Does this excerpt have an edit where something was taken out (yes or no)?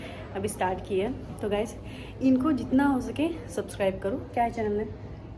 no